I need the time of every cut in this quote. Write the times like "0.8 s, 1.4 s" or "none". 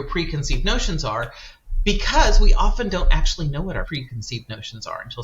3.9 s

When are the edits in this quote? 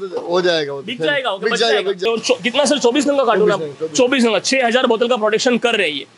2.0 s

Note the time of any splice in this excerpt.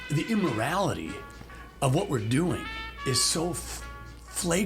2.8 s

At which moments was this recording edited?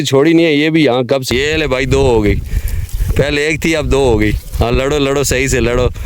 1.2 s

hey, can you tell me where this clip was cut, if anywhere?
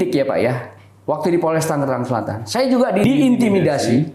3.0 s

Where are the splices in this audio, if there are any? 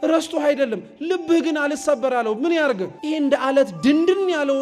2.9 s

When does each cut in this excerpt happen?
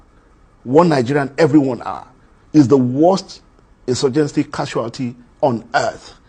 none

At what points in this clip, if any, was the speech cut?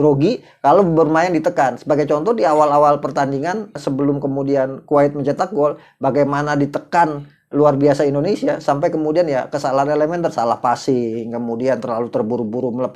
3.8 s

